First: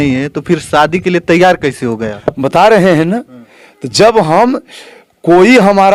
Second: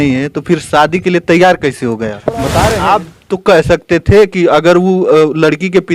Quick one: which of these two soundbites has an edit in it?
second; 1 cut; at 2.6 s

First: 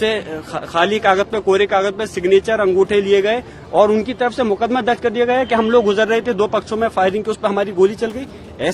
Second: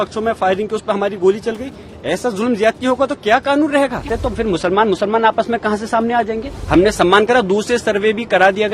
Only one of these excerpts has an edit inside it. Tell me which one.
second; 2 cuts; at 4.1 s, 6.5 s

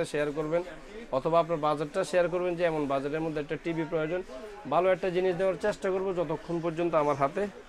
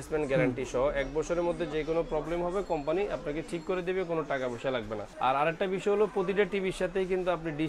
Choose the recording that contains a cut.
second; 1 cut; at 5.0 s

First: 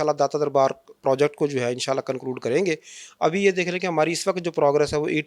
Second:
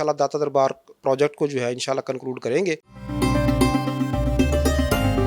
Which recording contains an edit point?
second; 1 cut; at 3.0 s

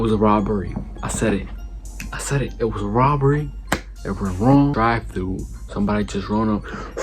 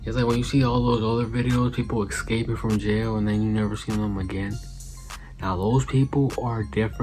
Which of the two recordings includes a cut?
first; 1 cut; at 4.7 s

